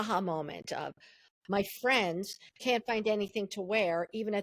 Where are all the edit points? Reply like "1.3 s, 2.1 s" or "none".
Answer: 1.3 s